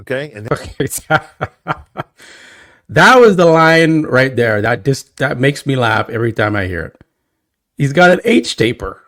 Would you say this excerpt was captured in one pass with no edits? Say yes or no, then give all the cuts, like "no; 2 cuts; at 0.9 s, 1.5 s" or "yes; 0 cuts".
yes; 0 cuts